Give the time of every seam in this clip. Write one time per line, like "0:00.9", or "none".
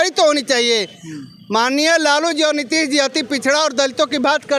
none